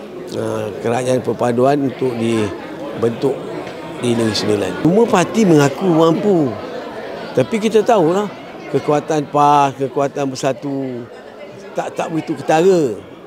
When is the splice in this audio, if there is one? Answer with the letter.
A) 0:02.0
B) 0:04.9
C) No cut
B